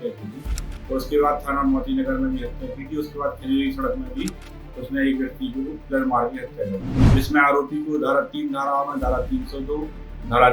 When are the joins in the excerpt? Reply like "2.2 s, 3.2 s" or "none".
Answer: 7.0 s